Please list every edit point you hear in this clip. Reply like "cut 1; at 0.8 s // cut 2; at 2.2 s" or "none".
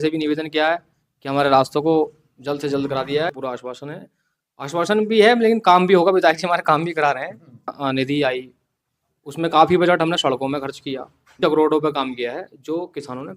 cut 1; at 3.3 s // cut 2; at 7.8 s // cut 3; at 11.4 s